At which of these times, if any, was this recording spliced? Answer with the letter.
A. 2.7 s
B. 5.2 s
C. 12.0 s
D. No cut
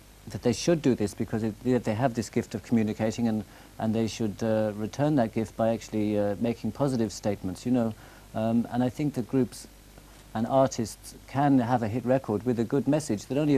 A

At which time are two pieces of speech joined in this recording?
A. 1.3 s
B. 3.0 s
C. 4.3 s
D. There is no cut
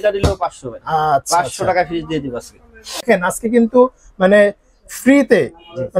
B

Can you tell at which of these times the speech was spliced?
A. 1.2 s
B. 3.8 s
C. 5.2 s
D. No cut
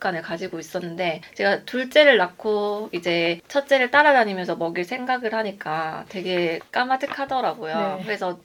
D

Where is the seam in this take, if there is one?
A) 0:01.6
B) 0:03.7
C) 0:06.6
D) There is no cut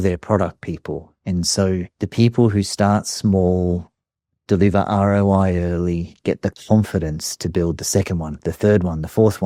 D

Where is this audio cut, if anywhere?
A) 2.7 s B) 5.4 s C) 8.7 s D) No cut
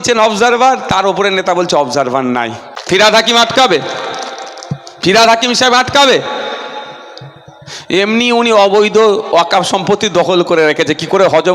A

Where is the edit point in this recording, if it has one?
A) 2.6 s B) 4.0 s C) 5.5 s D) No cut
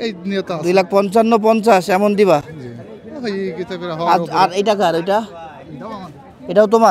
D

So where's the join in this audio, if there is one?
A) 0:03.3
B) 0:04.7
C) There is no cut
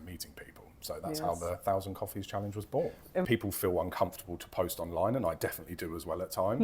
A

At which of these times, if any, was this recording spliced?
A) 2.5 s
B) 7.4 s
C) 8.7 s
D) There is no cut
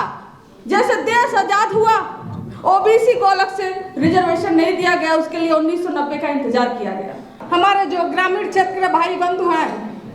B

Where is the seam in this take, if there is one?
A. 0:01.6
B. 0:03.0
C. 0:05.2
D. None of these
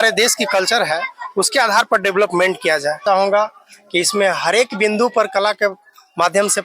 B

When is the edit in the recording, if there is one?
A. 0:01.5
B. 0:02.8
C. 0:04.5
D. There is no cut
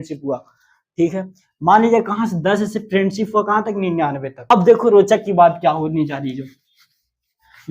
C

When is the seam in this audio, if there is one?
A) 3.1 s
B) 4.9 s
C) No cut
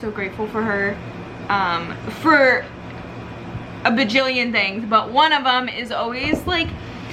C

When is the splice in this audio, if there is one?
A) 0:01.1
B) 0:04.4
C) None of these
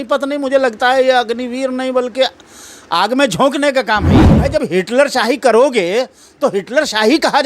B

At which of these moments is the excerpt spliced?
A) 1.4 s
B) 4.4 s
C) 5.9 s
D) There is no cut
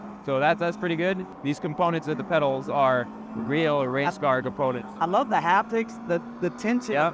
A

